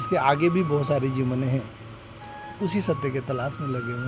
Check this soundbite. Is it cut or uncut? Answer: uncut